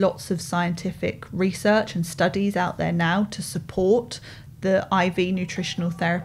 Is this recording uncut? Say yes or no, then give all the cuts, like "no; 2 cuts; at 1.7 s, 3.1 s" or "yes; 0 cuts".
yes; 0 cuts